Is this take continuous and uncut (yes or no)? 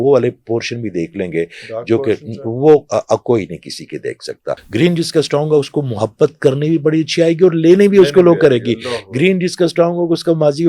no